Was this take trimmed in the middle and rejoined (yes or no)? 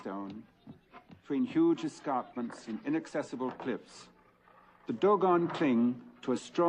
yes